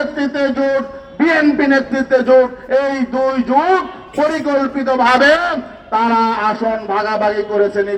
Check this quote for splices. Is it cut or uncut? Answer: uncut